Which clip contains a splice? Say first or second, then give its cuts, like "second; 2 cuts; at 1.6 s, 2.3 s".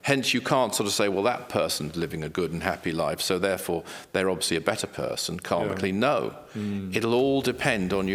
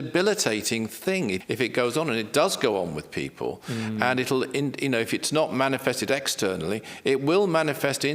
second; 1 cut; at 1.4 s